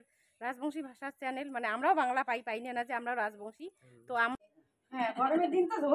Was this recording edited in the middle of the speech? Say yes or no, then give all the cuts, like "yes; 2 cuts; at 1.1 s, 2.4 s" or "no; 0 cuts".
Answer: yes; 1 cut; at 4.3 s